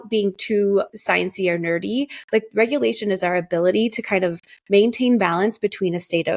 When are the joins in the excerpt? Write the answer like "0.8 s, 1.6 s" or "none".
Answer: 0.9 s